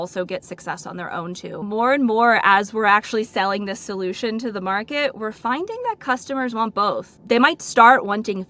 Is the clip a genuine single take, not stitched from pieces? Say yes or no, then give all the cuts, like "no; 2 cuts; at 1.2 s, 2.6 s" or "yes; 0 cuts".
no; 2 cuts; at 1.6 s, 7.1 s